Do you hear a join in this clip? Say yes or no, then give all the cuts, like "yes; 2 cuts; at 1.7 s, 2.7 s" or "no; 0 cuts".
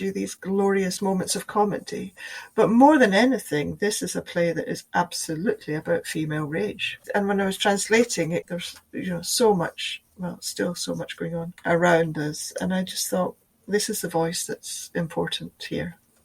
yes; 3 cuts; at 1.0 s, 7.0 s, 11.5 s